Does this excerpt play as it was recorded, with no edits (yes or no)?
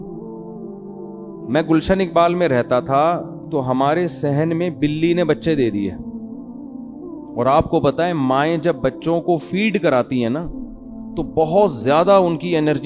yes